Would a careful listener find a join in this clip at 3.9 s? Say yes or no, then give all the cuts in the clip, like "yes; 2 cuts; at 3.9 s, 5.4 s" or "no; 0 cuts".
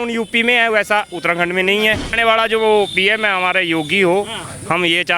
no; 1 cut; at 2.1 s